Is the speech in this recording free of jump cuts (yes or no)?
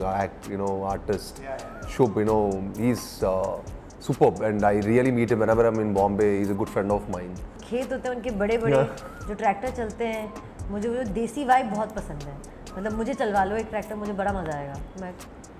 no